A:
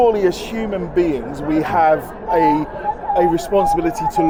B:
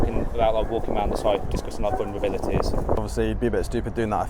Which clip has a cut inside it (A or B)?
B